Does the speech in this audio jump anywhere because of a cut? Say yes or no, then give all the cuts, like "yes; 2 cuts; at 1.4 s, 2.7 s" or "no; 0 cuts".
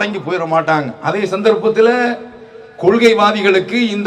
no; 0 cuts